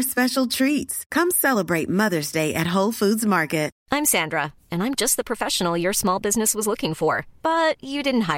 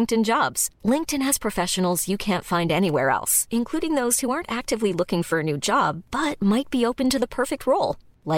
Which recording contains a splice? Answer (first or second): first